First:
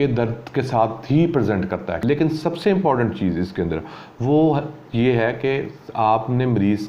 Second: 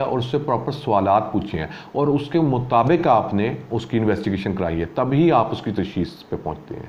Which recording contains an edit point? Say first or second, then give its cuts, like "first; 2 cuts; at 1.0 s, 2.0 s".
first; 1 cut; at 2.0 s